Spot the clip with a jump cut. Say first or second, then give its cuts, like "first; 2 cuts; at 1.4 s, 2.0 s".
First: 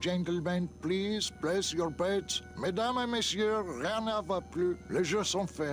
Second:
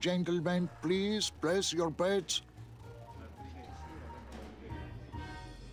first; 1 cut; at 2.4 s